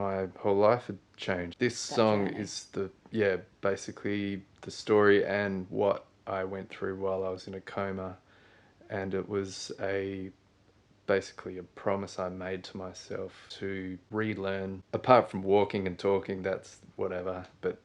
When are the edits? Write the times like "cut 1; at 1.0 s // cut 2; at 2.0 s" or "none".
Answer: cut 1; at 1.5 s // cut 2; at 13.4 s // cut 3; at 14.8 s